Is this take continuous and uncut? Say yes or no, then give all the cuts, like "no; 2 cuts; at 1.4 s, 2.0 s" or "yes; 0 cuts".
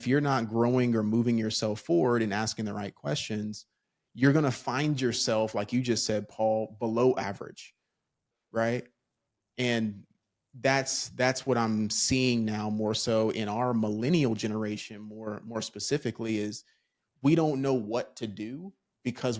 yes; 0 cuts